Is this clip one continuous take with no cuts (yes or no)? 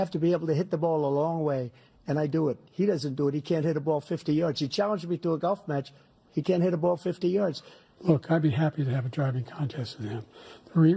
no